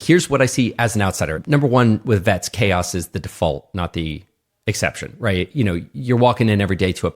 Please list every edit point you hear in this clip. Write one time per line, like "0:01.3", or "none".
0:01.3